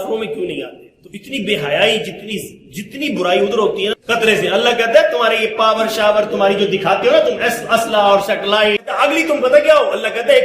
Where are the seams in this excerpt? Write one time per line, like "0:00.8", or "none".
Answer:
0:03.9
0:08.8